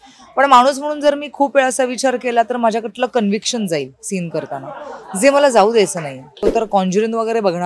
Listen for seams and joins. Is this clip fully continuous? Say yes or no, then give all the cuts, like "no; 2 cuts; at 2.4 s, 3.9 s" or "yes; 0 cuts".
no; 1 cut; at 6.4 s